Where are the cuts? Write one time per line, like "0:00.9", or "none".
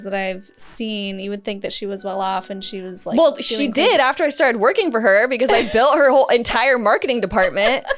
none